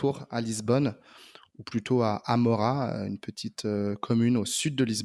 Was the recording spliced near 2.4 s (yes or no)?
no